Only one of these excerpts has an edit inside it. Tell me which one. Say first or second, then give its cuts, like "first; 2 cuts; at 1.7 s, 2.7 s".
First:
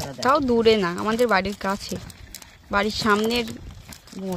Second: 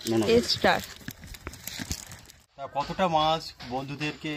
second; 1 cut; at 2.7 s